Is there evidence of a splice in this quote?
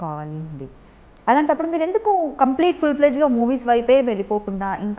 no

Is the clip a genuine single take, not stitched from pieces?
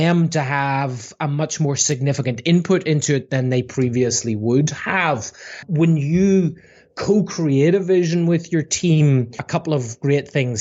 no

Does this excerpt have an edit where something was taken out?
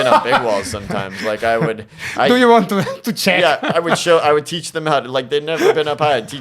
no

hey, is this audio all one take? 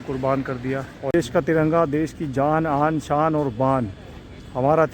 no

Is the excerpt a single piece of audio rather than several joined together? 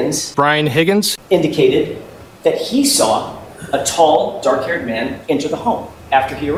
yes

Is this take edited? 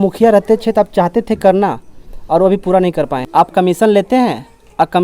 yes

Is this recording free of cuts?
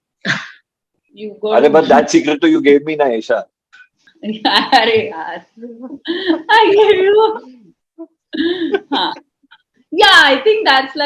yes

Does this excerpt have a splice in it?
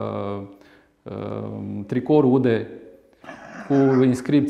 no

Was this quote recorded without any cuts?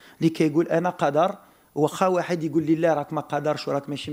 yes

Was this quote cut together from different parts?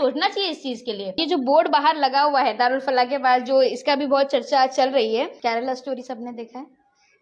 yes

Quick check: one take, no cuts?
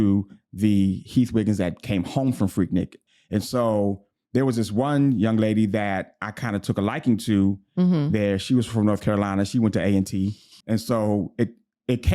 no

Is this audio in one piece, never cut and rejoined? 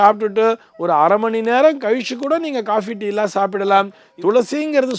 no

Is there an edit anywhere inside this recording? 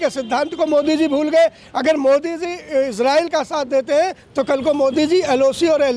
no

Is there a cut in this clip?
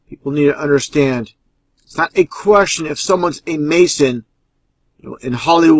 yes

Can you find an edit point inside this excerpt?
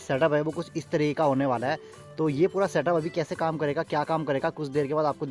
no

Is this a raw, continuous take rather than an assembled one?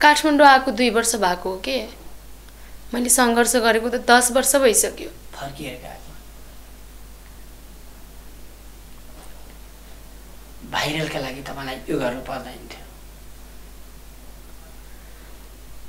yes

